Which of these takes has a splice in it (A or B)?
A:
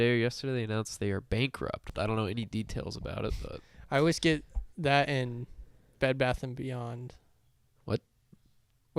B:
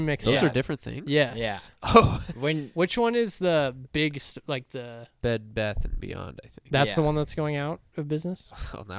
A